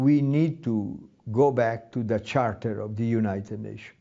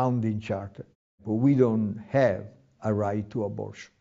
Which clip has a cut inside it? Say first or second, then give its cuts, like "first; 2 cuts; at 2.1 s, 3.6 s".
second; 1 cut; at 1.2 s